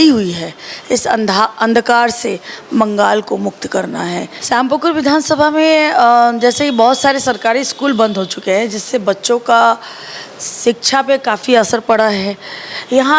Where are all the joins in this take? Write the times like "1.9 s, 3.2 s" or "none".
4.3 s